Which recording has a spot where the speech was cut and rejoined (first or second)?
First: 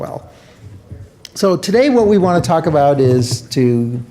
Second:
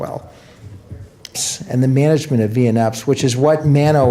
first